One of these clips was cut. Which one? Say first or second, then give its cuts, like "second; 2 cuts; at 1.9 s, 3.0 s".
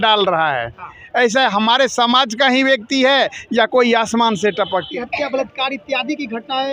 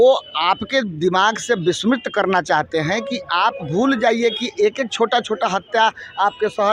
first; 1 cut; at 4.9 s